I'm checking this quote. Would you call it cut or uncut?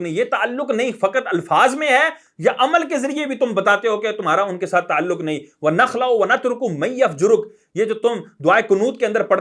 uncut